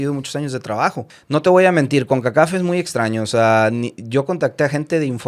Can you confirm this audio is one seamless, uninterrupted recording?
no; 1 cut; at 1.1 s

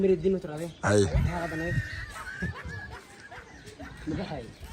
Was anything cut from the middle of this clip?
no; 0 cuts

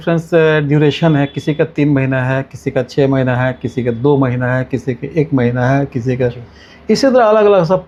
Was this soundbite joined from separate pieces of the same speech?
no; 0 cuts

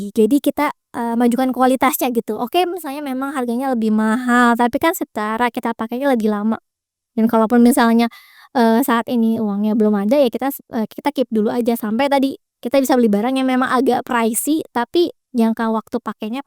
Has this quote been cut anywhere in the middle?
no; 0 cuts

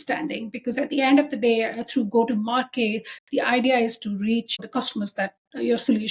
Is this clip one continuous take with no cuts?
no; 1 cut; at 4.5 s

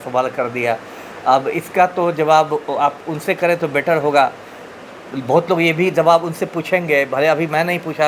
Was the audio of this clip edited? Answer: no; 0 cuts

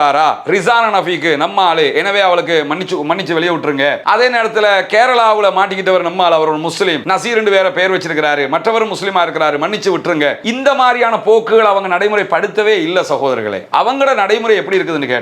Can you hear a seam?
no; 0 cuts

